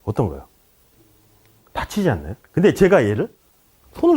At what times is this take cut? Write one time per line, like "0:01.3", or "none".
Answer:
none